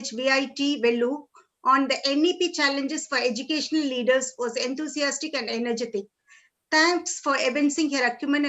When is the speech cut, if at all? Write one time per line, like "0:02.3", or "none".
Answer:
none